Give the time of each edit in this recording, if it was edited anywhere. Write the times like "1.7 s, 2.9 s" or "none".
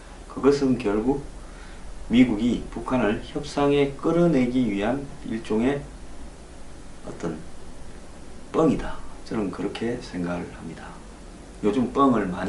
none